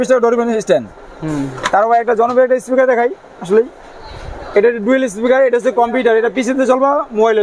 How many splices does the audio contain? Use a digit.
0